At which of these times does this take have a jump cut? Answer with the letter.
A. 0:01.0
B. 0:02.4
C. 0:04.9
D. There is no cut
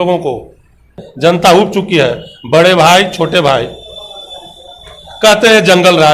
A